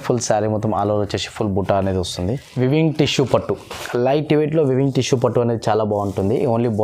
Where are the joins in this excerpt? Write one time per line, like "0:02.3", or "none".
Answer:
0:02.4